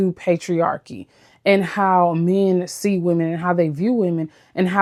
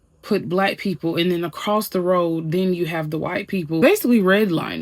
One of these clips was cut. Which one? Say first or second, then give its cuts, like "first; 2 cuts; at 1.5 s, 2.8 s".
second; 1 cut; at 3.8 s